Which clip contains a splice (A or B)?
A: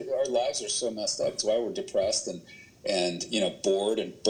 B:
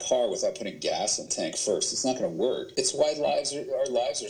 B